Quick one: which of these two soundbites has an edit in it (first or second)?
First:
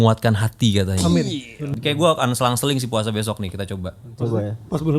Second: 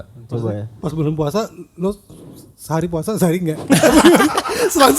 first